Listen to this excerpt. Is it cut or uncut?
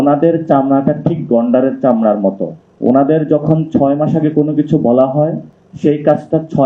uncut